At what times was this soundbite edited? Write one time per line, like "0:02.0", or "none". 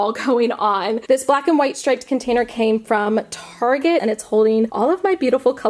0:01.0
0:04.0